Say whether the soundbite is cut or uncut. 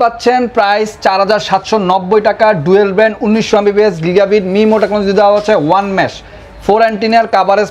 uncut